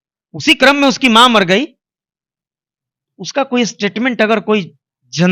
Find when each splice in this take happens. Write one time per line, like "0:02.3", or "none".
none

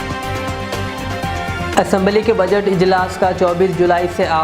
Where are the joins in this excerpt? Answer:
0:01.7

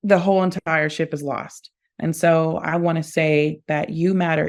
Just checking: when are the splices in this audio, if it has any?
none

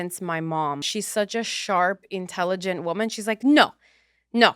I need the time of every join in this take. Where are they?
0:01.0

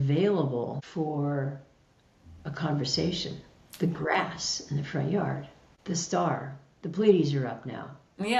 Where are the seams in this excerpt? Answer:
none

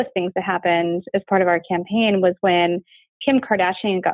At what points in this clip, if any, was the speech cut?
none

